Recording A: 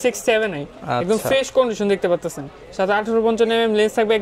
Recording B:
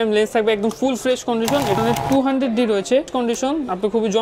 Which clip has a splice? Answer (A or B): B